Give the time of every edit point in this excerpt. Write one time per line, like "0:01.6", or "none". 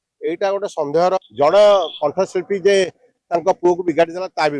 0:01.3